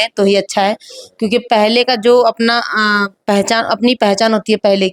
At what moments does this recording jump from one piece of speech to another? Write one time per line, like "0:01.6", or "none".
none

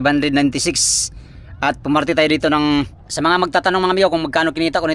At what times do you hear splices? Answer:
0:03.0

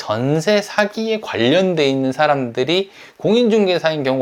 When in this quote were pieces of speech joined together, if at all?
none

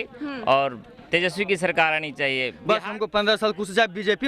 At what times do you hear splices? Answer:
0:02.5

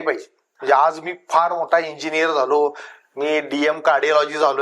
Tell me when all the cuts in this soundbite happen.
none

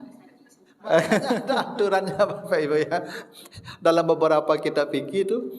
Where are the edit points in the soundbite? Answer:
0:01.4

